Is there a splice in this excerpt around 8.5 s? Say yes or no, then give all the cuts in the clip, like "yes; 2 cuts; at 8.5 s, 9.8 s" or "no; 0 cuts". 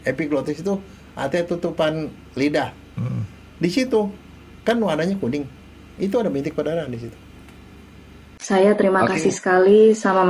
yes; 1 cut; at 8.5 s